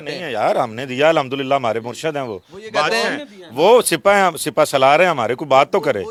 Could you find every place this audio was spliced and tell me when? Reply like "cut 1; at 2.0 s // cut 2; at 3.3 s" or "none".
none